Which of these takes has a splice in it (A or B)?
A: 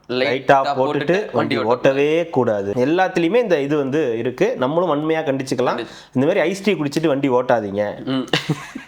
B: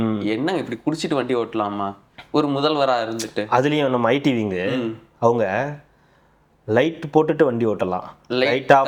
A